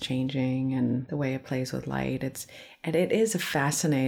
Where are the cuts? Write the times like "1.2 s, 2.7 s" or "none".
1.1 s